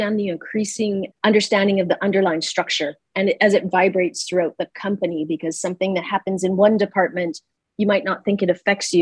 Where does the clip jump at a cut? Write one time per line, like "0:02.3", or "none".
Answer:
0:01.1